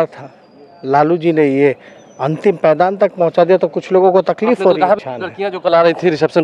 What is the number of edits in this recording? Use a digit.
1